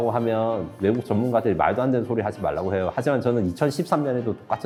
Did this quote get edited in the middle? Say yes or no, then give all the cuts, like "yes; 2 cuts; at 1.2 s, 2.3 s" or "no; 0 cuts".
no; 0 cuts